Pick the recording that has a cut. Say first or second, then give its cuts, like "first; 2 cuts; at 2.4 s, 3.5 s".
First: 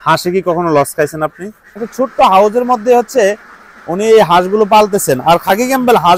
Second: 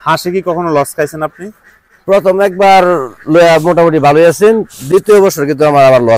first; 1 cut; at 1.9 s